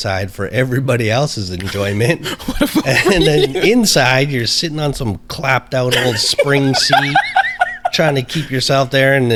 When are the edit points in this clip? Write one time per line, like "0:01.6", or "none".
none